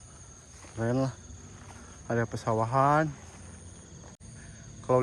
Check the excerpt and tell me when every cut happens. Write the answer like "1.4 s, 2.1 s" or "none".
4.1 s